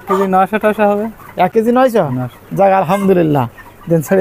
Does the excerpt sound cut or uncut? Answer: uncut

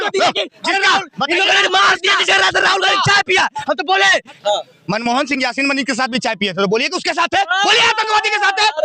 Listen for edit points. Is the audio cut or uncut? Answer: cut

